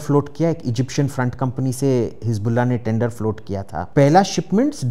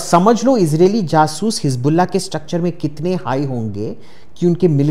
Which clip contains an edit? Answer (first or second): first